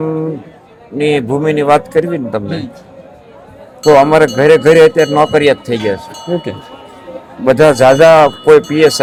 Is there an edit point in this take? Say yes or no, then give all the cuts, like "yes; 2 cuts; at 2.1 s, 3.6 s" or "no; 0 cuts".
no; 0 cuts